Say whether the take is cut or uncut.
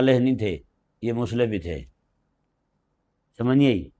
uncut